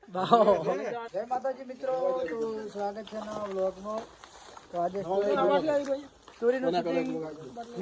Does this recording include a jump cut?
yes; 1 cut; at 1.0 s

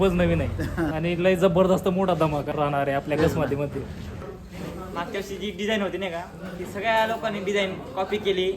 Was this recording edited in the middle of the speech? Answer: yes; 3 cuts; at 0.9 s, 2.5 s, 4.2 s

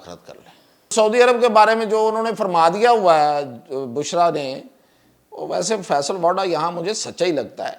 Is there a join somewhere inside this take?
yes; 1 cut; at 0.9 s

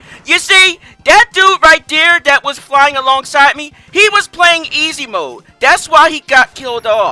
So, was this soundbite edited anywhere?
no; 0 cuts

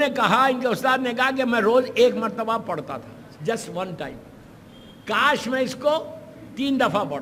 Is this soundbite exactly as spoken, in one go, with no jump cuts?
yes; 0 cuts

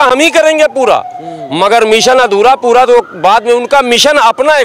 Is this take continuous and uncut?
yes; 0 cuts

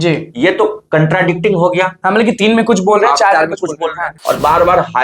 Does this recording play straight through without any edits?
no; 1 cut; at 4.1 s

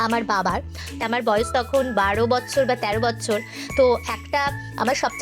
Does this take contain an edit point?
yes; 1 cut; at 1.0 s

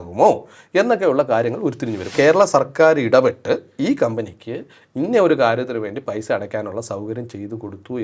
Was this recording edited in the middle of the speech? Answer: yes; 1 cut; at 2.1 s

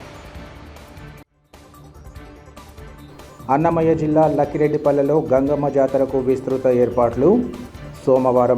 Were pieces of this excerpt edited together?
no; 0 cuts

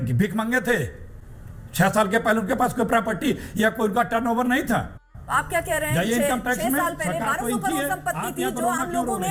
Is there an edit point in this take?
no; 0 cuts

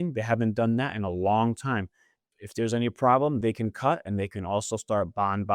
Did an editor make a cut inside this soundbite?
yes; 1 cut; at 3.4 s

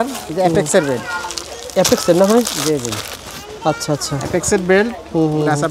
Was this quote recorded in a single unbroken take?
yes; 0 cuts

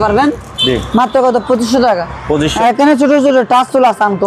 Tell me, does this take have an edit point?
yes; 1 cut; at 2.5 s

